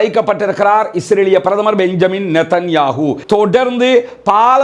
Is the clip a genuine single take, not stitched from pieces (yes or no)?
no